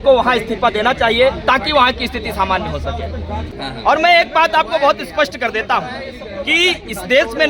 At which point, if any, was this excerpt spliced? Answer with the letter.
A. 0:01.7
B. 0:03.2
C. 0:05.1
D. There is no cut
D